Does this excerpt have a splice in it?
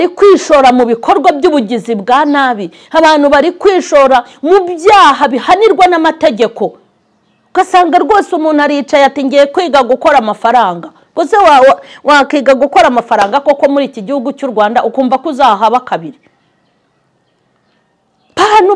no; 0 cuts

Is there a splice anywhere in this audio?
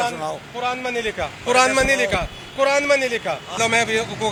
no; 0 cuts

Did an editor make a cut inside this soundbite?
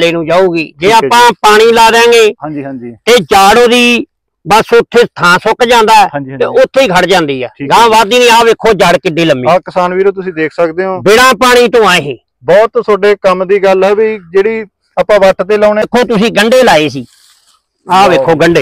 yes; 1 cut; at 15.9 s

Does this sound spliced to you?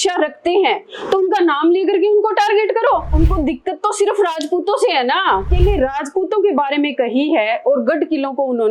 yes; 2 cuts; at 3.1 s, 5.5 s

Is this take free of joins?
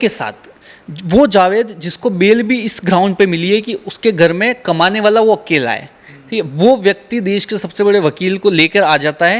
yes; 0 cuts

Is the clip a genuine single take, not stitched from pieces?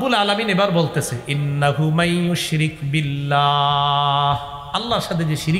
yes; 0 cuts

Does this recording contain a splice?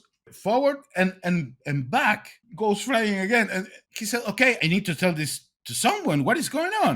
yes; 3 cuts; at 2.4 s, 3.8 s, 4.6 s

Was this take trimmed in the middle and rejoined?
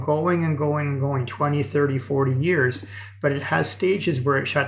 no; 0 cuts

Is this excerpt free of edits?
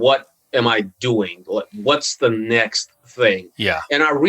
yes; 0 cuts

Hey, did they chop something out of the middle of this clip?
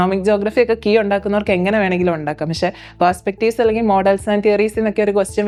no; 0 cuts

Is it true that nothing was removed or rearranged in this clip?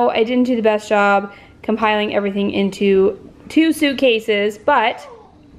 yes; 0 cuts

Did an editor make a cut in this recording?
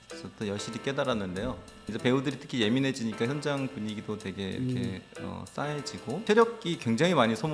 yes; 2 cuts; at 1.9 s, 6.2 s

